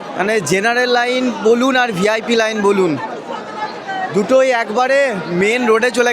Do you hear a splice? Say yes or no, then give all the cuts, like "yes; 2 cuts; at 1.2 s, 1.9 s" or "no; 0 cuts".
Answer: no; 0 cuts